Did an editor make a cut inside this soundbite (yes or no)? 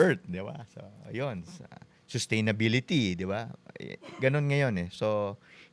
no